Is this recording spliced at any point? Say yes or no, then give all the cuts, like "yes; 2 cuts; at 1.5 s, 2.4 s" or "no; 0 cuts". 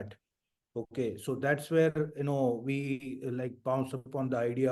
no; 0 cuts